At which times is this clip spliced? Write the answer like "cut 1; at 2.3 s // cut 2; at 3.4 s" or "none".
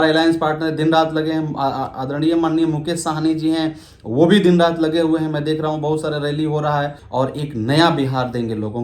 cut 1; at 7.0 s

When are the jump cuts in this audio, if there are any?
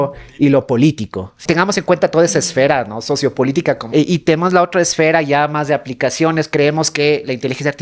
cut 1; at 1.4 s // cut 2; at 3.8 s // cut 3; at 6.5 s

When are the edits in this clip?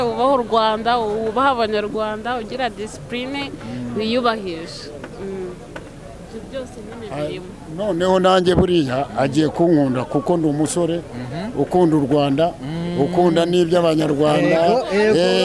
none

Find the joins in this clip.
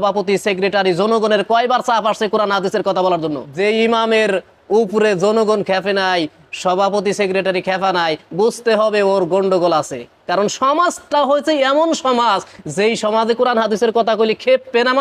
cut 1; at 3.4 s

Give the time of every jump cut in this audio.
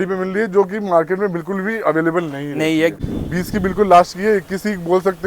cut 1; at 3.0 s

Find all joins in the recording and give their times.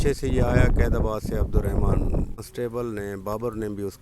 cut 1; at 2.4 s

